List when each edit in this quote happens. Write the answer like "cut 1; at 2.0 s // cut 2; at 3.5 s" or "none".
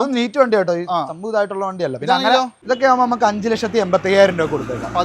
cut 1; at 2.6 s

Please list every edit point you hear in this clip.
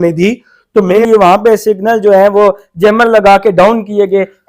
cut 1; at 1.0 s

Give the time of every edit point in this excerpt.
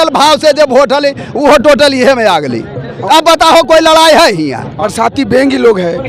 cut 1; at 4.7 s

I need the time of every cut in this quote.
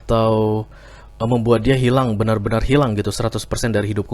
none

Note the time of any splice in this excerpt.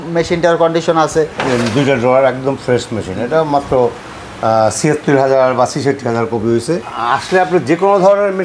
cut 1; at 1.4 s // cut 2; at 6.9 s

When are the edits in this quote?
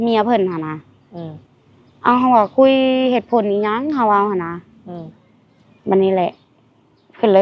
none

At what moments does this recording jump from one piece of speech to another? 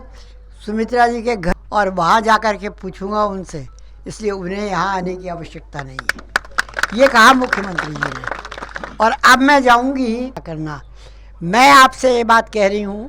cut 1; at 1.5 s // cut 2; at 10.4 s

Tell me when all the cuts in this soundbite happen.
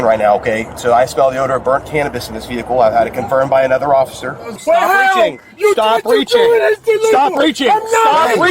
cut 1; at 4.6 s

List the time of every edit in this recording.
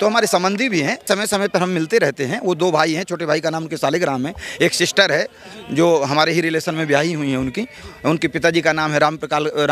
cut 1; at 1.0 s

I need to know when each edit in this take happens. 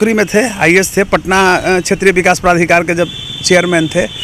none

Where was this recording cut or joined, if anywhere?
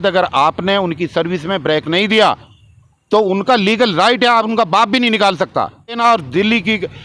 cut 1; at 6.0 s

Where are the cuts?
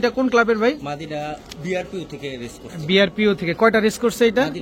none

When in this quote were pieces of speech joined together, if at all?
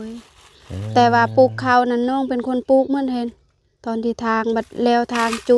none

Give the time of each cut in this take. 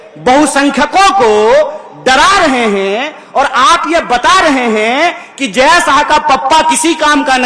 none

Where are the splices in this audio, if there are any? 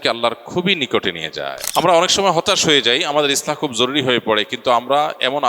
cut 1; at 1.6 s

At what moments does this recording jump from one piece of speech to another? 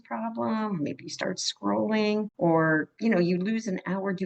cut 1; at 2.3 s // cut 2; at 2.9 s

